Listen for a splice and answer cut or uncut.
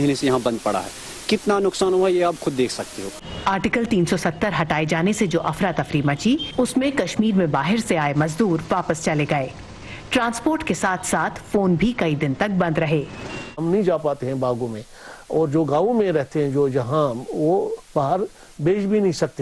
uncut